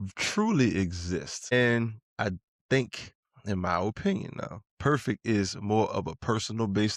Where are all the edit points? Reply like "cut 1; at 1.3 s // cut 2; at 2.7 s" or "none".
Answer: cut 1; at 1.5 s